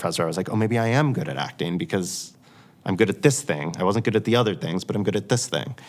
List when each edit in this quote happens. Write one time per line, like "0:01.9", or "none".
none